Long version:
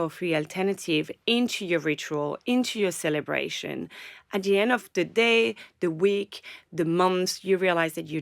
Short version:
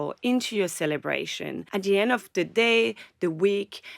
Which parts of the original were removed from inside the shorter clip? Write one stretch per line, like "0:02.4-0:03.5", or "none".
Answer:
0:03.8-0:04.2